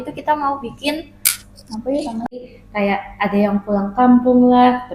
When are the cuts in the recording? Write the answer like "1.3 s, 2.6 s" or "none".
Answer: 2.2 s